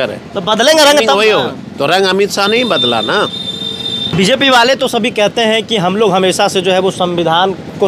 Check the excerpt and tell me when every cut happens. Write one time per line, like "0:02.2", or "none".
0:04.1